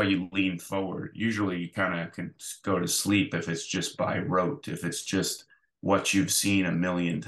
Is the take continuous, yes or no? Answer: yes